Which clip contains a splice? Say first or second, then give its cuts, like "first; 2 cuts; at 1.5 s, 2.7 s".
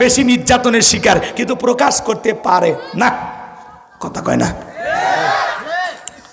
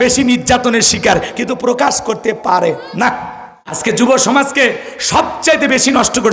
second; 1 cut; at 4.0 s